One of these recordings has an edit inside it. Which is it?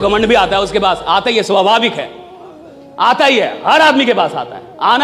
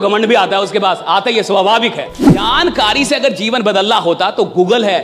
second; 1 cut; at 2.4 s

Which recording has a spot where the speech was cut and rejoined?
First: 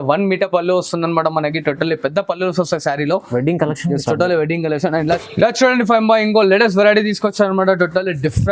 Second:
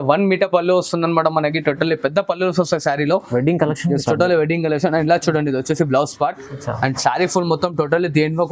first; 1 cut; at 5.2 s

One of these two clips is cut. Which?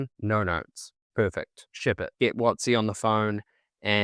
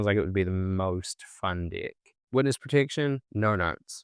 second; 1 cut; at 2.1 s

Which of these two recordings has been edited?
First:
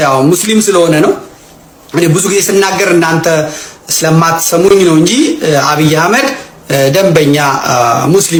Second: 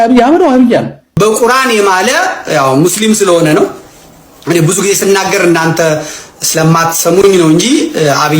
second; 1 cut; at 1.0 s

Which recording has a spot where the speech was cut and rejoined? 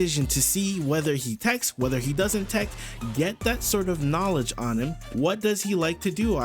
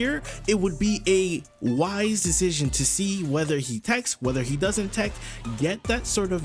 first; 1 cut; at 5.0 s

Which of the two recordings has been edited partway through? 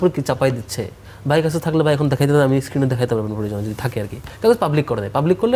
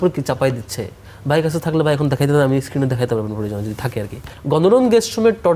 second; 1 cut; at 4.2 s

